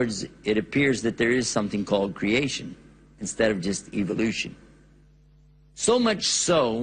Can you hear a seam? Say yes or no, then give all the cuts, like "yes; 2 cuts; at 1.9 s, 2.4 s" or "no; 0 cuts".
no; 0 cuts